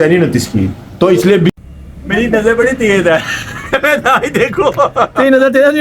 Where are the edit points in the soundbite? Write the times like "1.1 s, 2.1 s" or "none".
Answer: 1.5 s